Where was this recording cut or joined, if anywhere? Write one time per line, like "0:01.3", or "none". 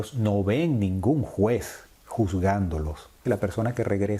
0:03.2